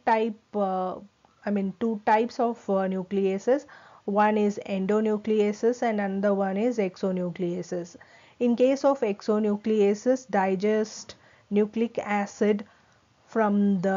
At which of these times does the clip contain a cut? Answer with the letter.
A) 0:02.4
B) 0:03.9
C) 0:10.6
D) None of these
D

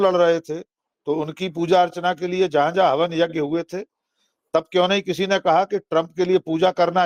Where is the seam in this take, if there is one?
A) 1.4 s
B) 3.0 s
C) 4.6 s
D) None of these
D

